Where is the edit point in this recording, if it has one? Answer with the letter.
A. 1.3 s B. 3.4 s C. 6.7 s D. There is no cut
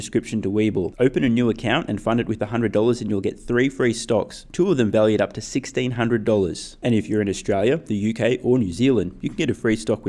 D